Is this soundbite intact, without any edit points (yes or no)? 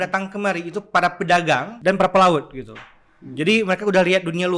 no